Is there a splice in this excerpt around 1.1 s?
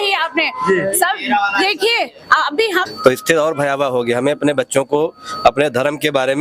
no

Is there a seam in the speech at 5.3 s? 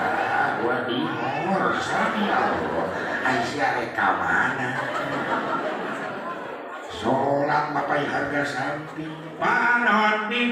no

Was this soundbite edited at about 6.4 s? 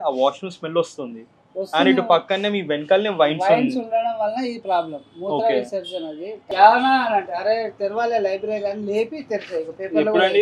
no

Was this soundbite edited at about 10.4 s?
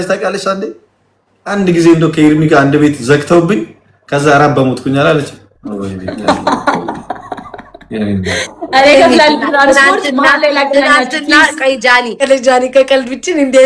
no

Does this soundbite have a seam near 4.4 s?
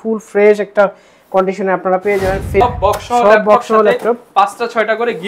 no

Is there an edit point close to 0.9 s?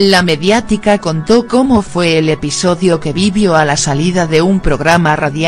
no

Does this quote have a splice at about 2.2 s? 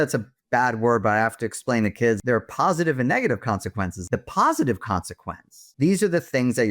yes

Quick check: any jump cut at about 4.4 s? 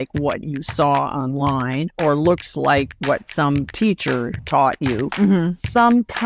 yes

